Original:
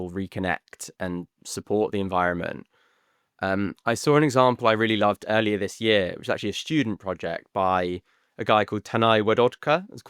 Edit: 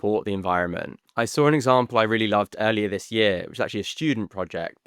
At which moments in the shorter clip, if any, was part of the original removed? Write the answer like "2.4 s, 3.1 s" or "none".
1.1 s